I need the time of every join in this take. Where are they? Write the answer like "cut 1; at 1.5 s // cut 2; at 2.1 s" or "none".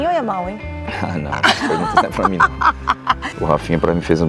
cut 1; at 3.3 s